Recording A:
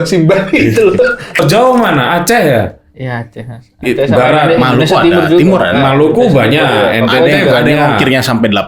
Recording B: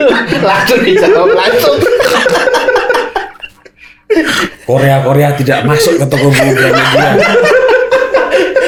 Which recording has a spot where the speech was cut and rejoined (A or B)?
A